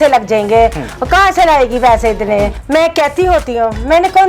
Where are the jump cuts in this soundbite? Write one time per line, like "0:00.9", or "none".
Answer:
0:02.6